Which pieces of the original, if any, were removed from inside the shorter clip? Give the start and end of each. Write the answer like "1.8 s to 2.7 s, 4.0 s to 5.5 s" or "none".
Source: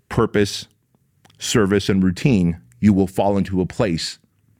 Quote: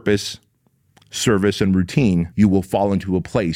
2.6 s to 2.7 s